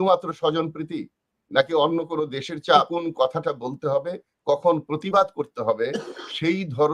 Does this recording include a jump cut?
yes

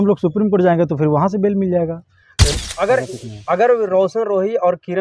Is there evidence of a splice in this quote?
yes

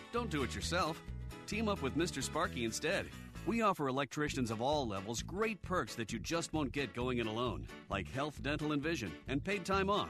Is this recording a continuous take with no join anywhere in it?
yes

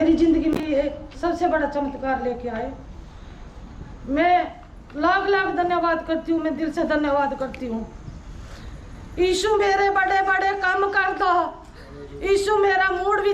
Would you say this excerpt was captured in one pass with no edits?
yes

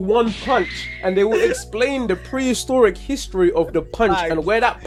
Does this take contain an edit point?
no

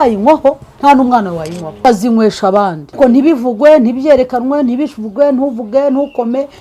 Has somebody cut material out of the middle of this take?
yes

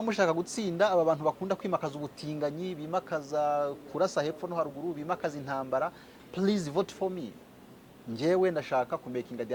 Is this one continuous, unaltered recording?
yes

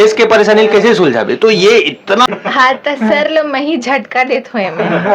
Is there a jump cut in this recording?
yes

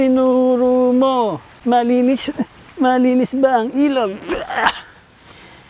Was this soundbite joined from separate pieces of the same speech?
yes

